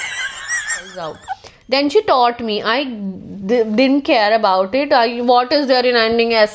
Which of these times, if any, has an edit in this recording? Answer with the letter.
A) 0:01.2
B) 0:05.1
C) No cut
A